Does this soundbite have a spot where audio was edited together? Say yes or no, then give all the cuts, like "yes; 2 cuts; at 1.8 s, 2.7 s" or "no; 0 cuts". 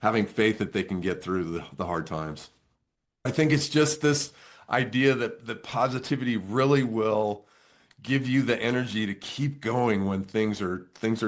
yes; 1 cut; at 3.3 s